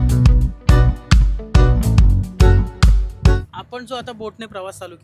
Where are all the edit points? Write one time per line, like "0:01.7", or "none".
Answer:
none